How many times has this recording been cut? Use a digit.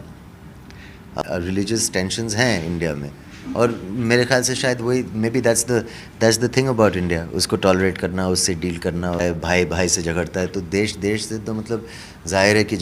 2